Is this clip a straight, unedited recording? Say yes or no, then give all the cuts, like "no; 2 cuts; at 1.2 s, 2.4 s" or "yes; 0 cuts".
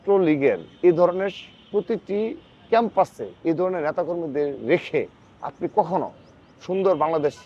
yes; 0 cuts